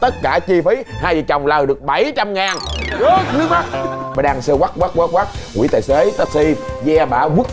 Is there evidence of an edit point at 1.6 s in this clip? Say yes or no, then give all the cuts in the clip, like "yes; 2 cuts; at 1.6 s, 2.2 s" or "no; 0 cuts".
no; 1 cut; at 4.0 s